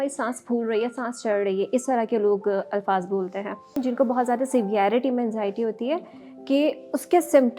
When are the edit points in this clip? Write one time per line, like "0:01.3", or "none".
0:03.7